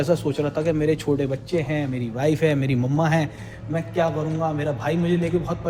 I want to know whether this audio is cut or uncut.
uncut